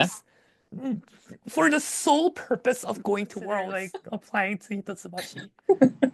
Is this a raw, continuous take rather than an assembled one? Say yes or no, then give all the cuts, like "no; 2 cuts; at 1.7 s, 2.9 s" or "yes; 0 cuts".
no; 1 cut; at 3.8 s